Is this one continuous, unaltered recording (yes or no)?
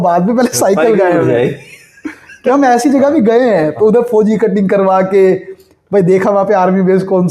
yes